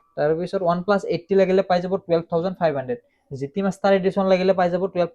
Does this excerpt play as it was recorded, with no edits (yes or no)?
yes